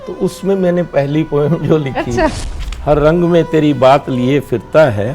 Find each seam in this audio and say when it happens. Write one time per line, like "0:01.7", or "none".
0:02.4